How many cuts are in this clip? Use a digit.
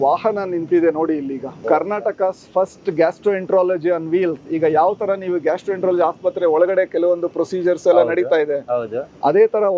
1